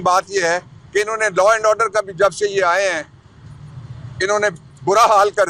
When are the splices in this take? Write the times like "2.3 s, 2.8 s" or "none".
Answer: none